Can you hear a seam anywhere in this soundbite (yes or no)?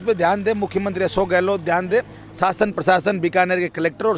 no